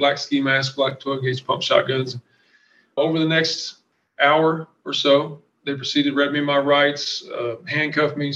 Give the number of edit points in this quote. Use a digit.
1